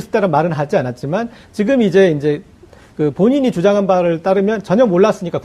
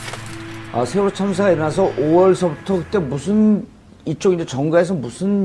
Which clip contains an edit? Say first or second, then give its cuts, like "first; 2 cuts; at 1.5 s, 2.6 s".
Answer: first; 1 cut; at 2.2 s